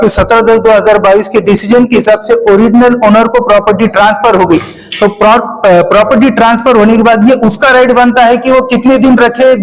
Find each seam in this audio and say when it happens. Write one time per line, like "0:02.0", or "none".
none